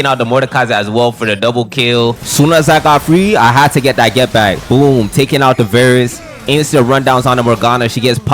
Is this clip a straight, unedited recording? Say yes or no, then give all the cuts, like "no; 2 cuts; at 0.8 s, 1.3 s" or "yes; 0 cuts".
no; 1 cut; at 2.2 s